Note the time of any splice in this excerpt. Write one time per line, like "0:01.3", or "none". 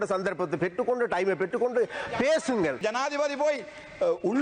0:02.8